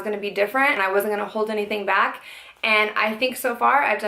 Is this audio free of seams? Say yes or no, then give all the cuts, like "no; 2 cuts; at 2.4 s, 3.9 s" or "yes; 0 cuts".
no; 1 cut; at 2.9 s